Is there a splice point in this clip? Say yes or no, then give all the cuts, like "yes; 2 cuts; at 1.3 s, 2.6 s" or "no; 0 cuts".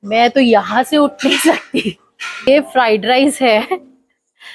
yes; 1 cut; at 2.5 s